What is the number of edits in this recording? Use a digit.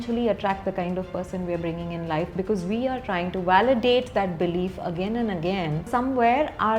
1